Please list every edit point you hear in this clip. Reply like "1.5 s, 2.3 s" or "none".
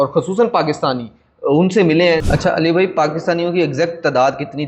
2.2 s